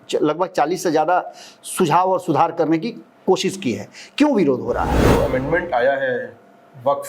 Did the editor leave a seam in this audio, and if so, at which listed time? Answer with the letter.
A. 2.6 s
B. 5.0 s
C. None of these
B